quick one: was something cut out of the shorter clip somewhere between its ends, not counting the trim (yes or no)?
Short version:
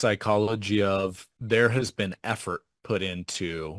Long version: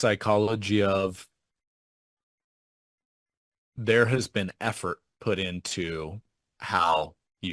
yes